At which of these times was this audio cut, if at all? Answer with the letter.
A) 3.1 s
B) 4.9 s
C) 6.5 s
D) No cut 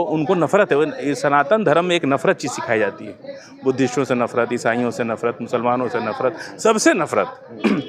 D